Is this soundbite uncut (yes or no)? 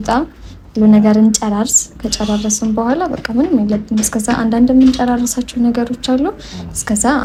yes